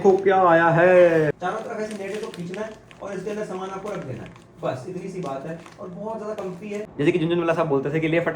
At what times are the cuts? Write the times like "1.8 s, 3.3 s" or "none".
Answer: 1.4 s, 6.9 s

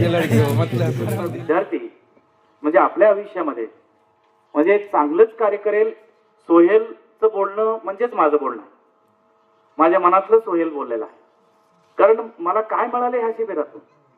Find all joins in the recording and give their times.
1.0 s

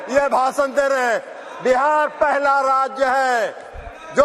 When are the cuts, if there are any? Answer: none

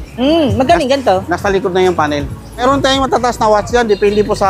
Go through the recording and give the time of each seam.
2.6 s

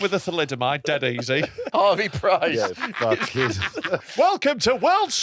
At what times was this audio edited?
1.7 s, 4.0 s

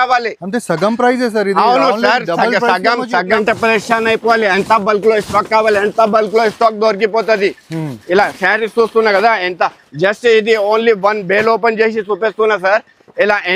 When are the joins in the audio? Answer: 3.3 s

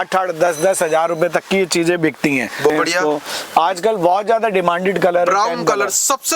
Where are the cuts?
2.7 s

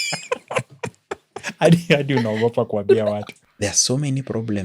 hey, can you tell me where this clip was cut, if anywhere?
3.3 s

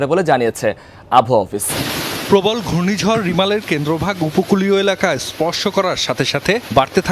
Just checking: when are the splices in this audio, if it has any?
1.8 s

